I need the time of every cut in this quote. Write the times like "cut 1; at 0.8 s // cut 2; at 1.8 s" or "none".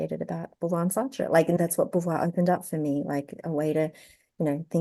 cut 1; at 1.6 s